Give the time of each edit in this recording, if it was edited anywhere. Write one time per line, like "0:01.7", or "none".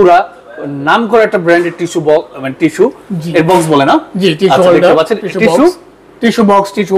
none